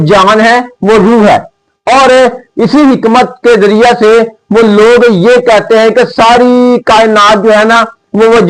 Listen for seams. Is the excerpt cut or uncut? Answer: uncut